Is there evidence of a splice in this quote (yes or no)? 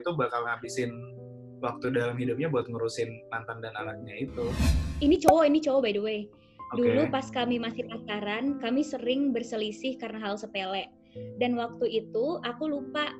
yes